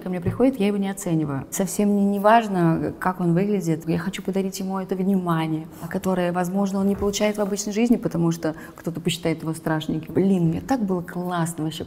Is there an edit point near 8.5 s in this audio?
no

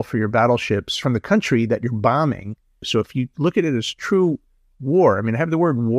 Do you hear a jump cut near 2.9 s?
yes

